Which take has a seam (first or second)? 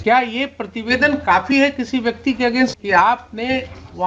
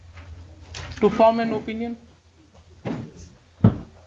first